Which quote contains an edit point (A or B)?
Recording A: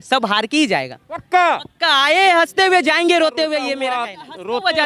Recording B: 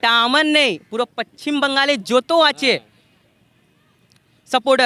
A